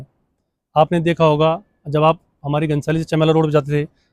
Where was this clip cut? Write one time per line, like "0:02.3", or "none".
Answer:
none